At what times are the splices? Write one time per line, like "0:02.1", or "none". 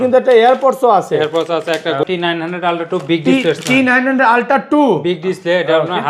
0:02.0